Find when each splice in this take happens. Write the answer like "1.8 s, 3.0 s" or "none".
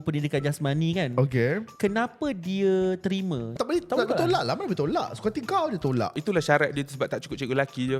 1.7 s, 3.5 s, 6.2 s